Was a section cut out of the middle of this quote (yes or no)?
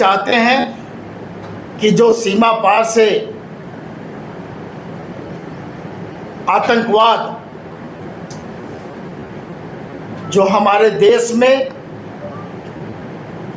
no